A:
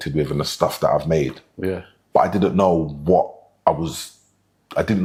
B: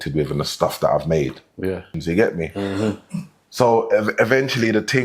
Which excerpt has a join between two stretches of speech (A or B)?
B